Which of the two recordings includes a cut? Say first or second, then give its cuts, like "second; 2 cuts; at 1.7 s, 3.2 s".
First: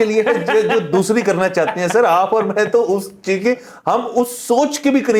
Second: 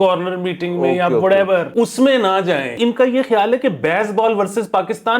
second; 2 cuts; at 1.7 s, 2.8 s